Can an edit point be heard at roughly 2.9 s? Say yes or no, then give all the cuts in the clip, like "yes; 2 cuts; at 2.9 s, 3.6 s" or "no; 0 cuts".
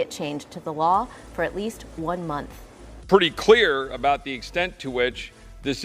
yes; 1 cut; at 2.9 s